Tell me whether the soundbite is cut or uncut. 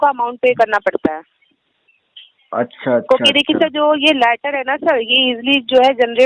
uncut